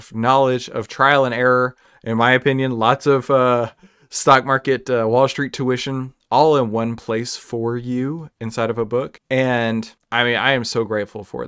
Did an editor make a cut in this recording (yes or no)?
yes